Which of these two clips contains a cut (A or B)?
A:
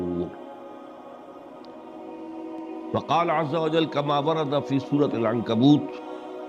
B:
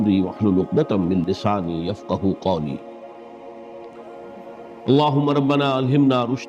B